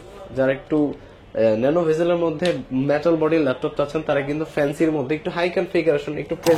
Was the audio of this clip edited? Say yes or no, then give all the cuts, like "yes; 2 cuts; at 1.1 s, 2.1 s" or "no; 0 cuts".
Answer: no; 0 cuts